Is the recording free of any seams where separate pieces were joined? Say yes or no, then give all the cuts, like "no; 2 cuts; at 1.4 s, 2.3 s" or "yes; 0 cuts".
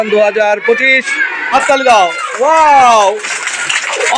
no; 1 cut; at 1.5 s